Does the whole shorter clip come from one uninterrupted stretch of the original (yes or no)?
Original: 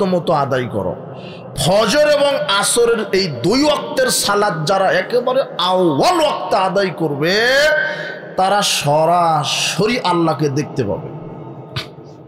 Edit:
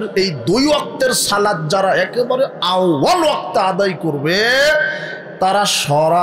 yes